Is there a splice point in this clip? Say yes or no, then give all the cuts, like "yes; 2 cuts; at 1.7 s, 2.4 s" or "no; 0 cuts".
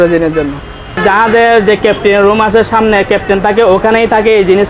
yes; 1 cut; at 1.0 s